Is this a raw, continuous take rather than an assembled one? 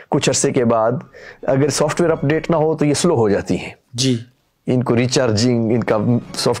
yes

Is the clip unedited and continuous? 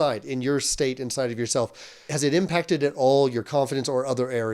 no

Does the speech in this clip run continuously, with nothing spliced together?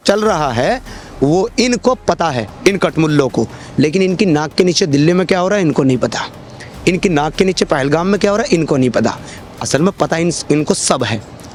yes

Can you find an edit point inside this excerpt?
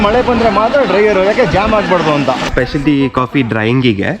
yes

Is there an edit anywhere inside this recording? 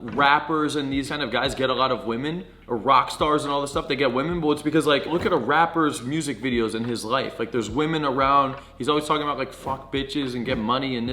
yes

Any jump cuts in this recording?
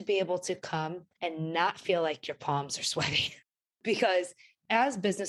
no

